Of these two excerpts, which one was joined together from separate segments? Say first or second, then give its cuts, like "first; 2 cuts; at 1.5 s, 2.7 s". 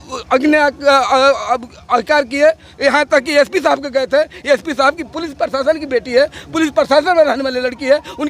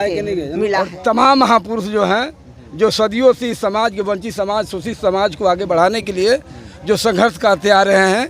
second; 1 cut; at 0.9 s